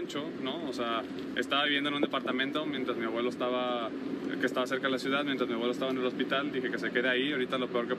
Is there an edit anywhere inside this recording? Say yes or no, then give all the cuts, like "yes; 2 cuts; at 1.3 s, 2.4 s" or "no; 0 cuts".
no; 0 cuts